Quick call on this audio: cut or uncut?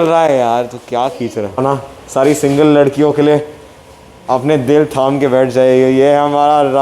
cut